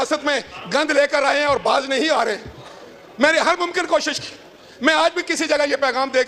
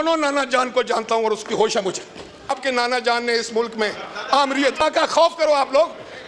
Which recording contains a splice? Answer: second; 2 cuts; at 2.6 s, 4.8 s

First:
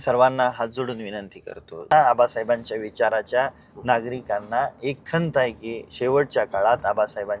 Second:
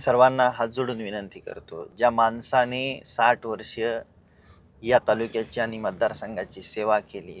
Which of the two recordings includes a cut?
first; 1 cut; at 1.9 s

